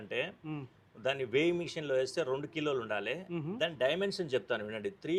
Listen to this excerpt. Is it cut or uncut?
uncut